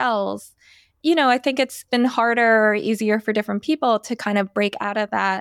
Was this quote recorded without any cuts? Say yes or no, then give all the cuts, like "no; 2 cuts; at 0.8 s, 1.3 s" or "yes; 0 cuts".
no; 1 cut; at 1.0 s